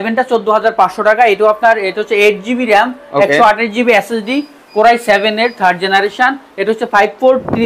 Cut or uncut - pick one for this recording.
uncut